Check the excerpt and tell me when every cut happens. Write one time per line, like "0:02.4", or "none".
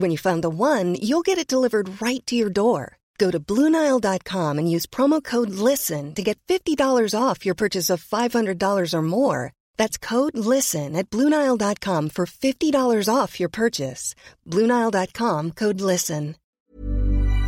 0:16.6